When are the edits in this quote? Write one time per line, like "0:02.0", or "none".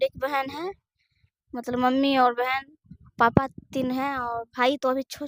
none